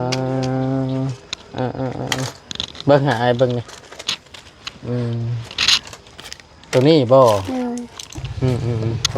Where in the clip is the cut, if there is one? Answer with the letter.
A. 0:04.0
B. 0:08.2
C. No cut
B